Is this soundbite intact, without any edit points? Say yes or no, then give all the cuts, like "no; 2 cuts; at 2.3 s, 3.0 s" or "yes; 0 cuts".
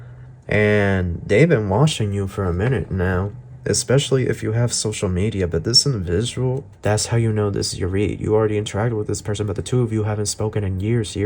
no; 1 cut; at 6.7 s